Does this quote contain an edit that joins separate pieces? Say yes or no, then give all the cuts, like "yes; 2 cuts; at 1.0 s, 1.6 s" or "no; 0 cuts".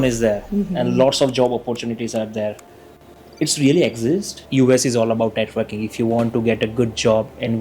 yes; 1 cut; at 4.4 s